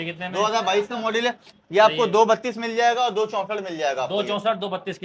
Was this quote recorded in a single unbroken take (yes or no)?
yes